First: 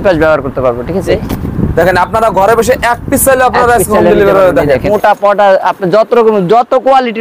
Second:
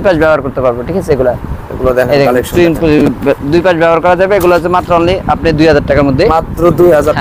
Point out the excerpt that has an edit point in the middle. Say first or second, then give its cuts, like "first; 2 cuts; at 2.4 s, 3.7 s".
first; 2 cuts; at 1.1 s, 4.9 s